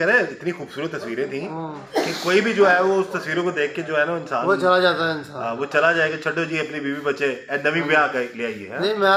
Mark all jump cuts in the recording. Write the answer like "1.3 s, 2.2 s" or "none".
none